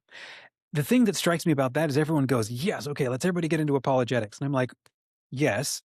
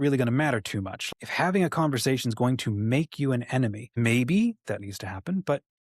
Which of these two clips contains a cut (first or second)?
second